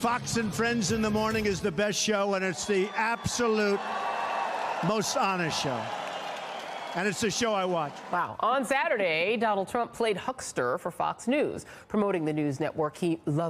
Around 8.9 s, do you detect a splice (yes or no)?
no